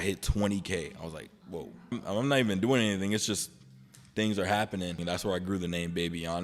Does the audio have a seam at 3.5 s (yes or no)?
no